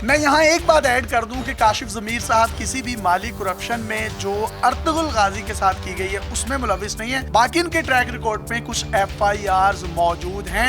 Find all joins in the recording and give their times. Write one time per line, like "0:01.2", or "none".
none